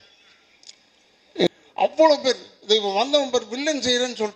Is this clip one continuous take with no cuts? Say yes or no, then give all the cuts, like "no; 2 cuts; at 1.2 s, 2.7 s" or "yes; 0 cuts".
no; 1 cut; at 1.5 s